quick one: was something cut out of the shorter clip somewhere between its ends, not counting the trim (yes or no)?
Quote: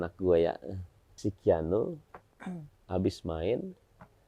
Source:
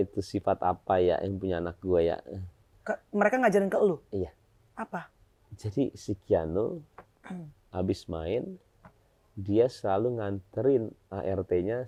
yes